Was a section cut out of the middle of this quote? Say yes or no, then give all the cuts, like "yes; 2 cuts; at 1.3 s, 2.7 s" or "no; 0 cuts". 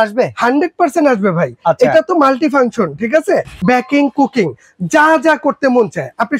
yes; 1 cut; at 3.6 s